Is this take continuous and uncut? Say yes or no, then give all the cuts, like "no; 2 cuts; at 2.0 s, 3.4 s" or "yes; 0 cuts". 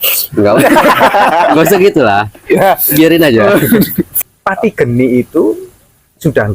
no; 1 cut; at 4.0 s